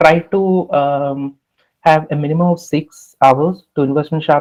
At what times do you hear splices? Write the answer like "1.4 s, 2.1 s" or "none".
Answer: none